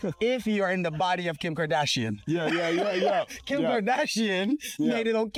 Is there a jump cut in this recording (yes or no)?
no